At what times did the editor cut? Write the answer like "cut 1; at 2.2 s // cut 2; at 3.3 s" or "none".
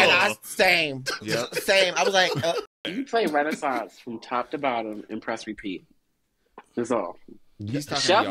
cut 1; at 2.8 s